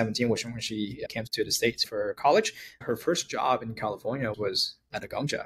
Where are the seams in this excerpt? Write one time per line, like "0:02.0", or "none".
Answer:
0:01.6
0:02.8
0:04.3